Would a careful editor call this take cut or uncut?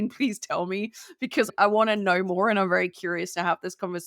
cut